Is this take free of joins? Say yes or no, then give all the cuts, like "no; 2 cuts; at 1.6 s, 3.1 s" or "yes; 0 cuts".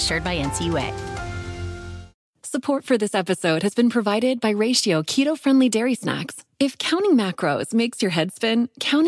no; 1 cut; at 2.1 s